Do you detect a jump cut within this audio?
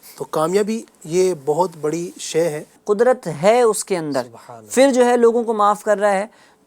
yes; 1 cut; at 2.7 s

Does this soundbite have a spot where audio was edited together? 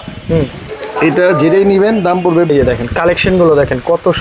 yes; 1 cut; at 2.5 s

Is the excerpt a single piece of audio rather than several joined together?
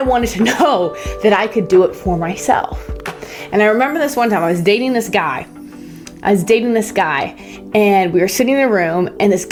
yes; 0 cuts

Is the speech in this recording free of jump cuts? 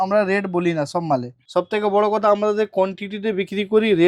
no; 1 cut; at 1.4 s

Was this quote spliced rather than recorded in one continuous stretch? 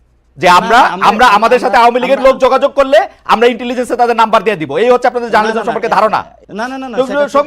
yes; 1 cut; at 6.4 s

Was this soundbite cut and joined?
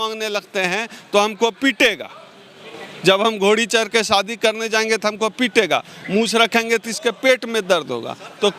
no; 0 cuts

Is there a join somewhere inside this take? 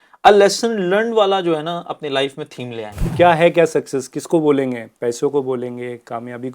yes; 1 cut; at 3.0 s

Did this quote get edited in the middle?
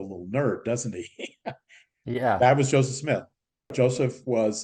yes; 1 cut; at 3.7 s

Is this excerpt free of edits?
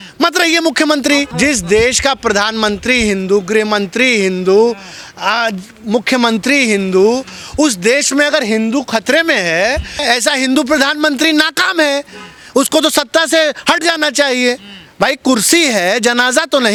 yes; 0 cuts

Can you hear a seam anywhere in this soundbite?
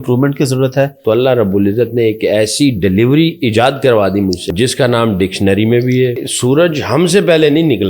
yes; 3 cuts; at 1.0 s, 4.4 s, 6.3 s

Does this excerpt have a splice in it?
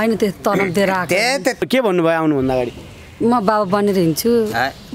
yes; 1 cut; at 1.6 s

